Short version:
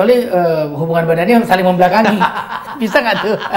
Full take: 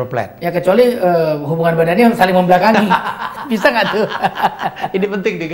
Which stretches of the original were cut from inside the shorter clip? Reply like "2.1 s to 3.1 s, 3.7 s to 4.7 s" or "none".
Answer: none